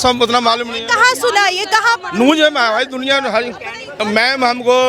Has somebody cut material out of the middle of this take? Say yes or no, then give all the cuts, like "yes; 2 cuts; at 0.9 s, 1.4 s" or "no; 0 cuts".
yes; 1 cut; at 3.8 s